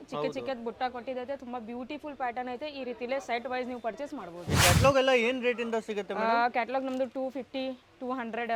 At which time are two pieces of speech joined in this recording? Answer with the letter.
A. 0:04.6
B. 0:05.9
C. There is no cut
A